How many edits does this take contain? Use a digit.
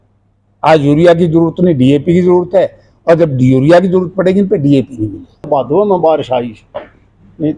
1